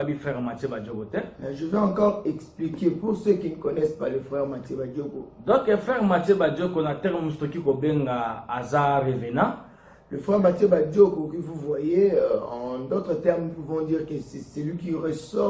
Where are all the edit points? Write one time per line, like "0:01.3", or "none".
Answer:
none